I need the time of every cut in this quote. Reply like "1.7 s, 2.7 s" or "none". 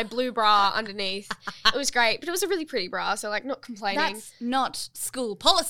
none